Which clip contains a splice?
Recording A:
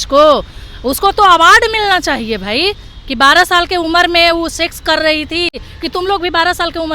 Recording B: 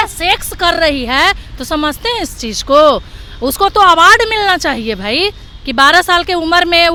A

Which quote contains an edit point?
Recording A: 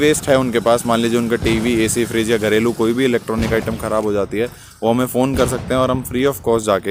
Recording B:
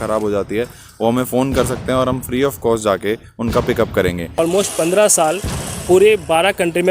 B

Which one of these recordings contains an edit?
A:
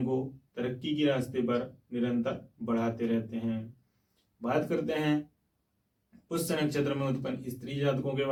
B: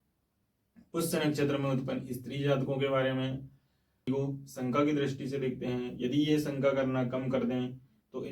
B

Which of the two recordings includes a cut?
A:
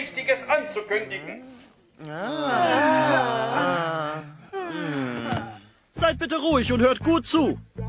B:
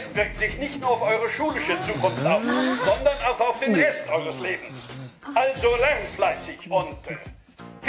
B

